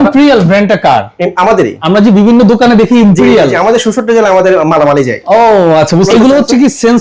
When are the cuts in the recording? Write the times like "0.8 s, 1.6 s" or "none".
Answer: 1.8 s, 6.1 s